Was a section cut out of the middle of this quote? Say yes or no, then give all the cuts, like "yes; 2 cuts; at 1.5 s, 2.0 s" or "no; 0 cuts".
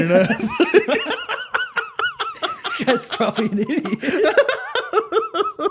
no; 0 cuts